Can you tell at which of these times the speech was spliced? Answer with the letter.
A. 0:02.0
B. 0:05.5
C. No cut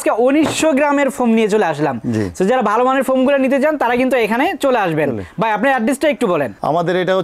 C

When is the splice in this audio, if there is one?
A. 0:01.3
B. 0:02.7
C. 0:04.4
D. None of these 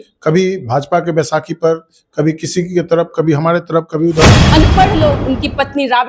C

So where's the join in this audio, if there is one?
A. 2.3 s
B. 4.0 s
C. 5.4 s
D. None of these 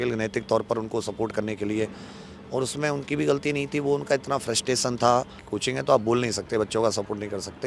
C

